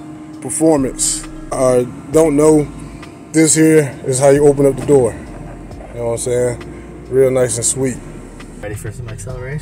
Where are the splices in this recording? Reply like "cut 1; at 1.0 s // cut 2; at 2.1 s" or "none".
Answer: cut 1; at 1.6 s // cut 2; at 8.6 s